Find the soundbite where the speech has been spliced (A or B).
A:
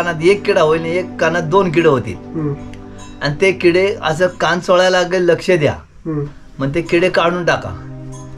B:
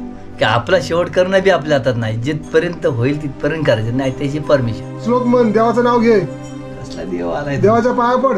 B